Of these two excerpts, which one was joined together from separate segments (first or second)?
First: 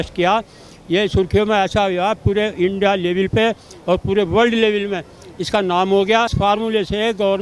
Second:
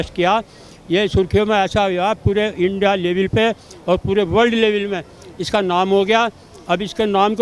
first